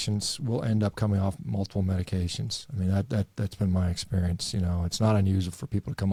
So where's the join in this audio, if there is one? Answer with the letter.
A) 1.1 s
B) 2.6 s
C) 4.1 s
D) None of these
D